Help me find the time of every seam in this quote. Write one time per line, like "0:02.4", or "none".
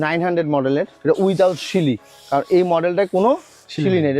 0:00.9

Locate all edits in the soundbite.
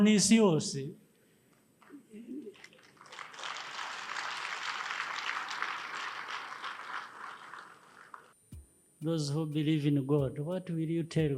0:08.3

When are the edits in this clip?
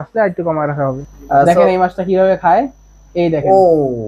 0:01.1

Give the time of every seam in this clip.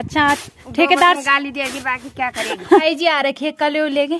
0:02.8

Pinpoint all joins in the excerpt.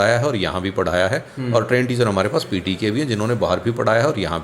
none

